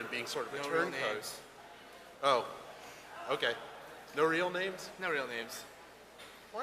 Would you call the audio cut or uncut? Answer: cut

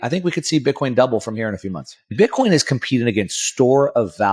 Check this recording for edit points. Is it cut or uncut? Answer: cut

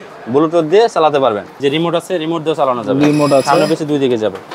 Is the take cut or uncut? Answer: cut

